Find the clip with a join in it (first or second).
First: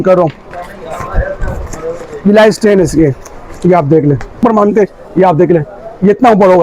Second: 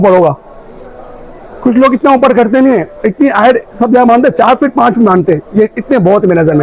first